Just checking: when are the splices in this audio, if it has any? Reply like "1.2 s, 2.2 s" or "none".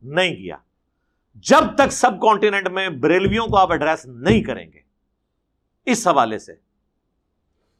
none